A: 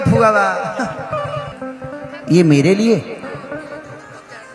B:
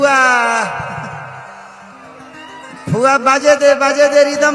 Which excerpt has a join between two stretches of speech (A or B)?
A